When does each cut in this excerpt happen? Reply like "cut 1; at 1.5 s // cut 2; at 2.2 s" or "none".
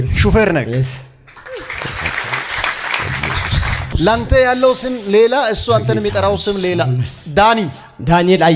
cut 1; at 3.9 s